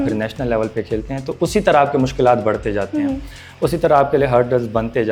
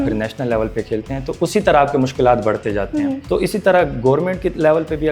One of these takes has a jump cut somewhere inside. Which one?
second; 1 cut; at 3.2 s

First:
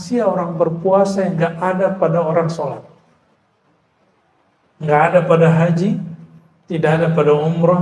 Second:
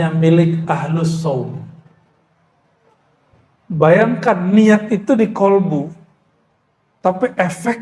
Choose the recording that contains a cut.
second; 1 cut; at 3.0 s

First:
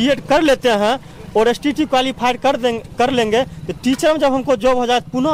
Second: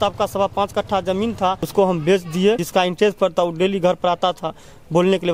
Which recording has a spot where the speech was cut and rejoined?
second; 2 cuts; at 1.6 s, 2.6 s

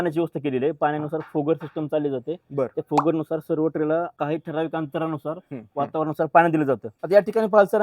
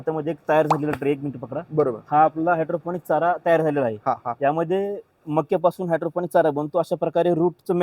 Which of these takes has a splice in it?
first; 2 cuts; at 4.1 s, 6.9 s

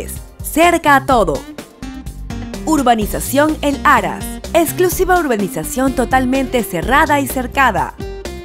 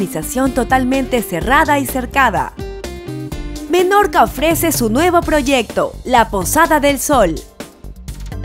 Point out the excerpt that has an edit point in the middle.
second; 1 cut; at 7.4 s

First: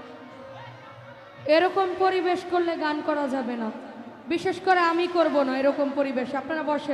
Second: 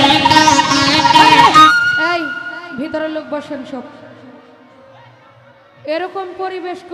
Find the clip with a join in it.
second; 1 cut; at 1.7 s

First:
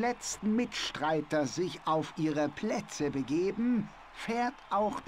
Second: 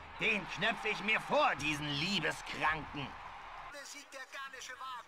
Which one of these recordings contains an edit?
second; 1 cut; at 3.7 s

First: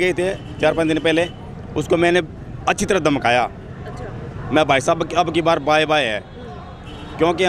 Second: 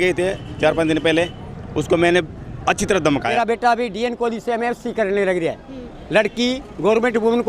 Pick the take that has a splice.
second; 1 cut; at 3.3 s

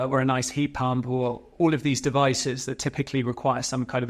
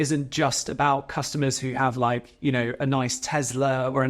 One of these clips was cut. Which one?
first; 1 cut; at 1.4 s

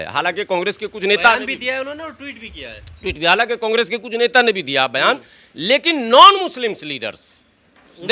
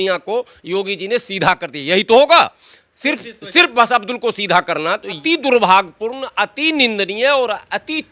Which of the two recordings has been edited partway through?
second; 1 cut; at 5.2 s

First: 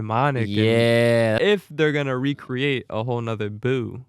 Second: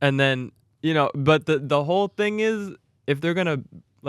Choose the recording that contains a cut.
first; 1 cut; at 1.4 s

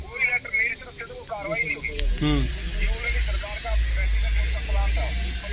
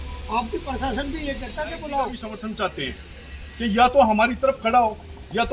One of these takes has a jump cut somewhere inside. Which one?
second; 1 cut; at 2.2 s

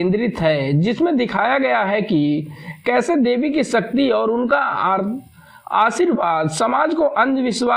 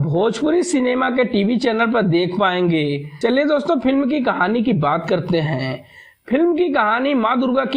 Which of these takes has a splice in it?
second; 1 cut; at 3.1 s

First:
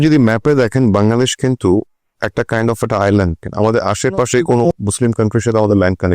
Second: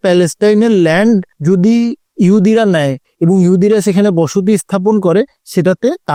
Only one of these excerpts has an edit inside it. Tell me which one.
first; 2 cuts; at 3.4 s, 4.7 s

